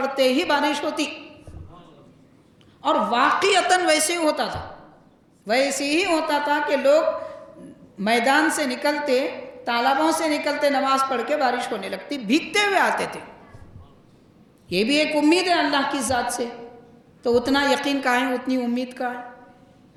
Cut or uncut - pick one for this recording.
uncut